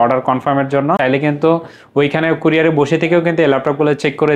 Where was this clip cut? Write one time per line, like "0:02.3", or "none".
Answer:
0:01.0

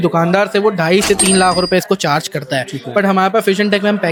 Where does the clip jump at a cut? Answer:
none

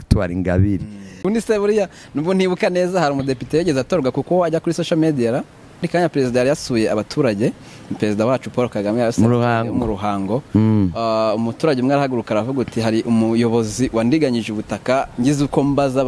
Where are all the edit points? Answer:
0:01.2
0:05.9

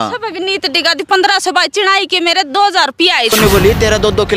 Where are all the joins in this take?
0:03.3

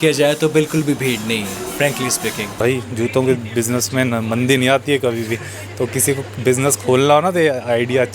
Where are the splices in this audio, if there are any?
0:02.5

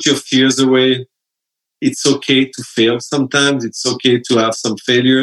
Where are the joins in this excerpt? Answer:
none

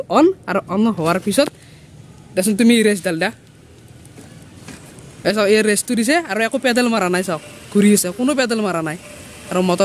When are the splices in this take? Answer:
none

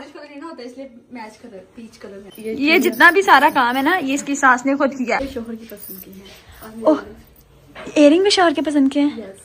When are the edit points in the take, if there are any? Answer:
0:02.3
0:05.3

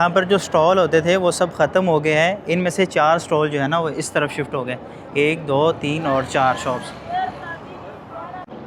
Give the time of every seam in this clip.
none

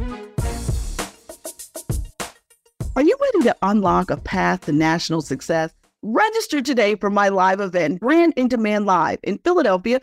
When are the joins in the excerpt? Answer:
0:01.1
0:02.9

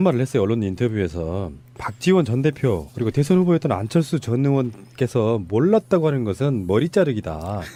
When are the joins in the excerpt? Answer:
none

